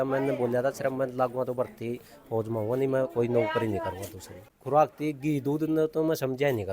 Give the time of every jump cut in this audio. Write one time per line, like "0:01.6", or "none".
0:04.5